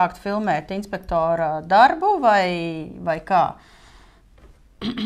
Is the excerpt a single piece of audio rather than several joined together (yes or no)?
yes